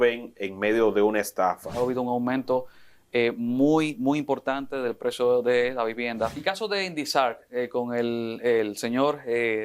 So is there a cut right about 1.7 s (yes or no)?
yes